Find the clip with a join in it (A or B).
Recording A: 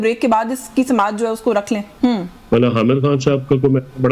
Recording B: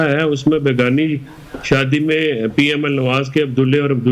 A